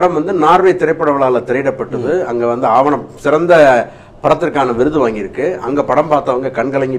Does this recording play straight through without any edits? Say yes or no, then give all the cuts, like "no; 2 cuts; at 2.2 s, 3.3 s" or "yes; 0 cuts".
yes; 0 cuts